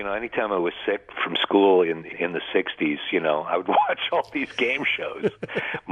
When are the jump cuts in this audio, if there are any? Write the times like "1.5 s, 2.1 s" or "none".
1.1 s, 2.1 s